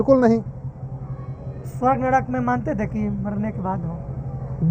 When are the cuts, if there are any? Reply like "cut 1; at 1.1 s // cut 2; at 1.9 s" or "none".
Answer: none